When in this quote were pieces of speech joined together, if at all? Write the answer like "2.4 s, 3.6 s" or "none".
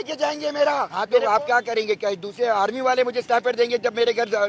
0.9 s